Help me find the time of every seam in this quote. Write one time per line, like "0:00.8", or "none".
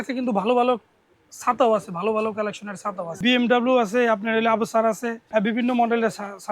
0:03.2
0:05.2